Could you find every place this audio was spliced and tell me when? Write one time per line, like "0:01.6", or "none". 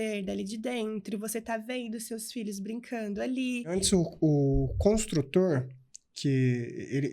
0:03.7